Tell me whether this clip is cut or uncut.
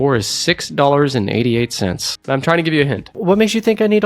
cut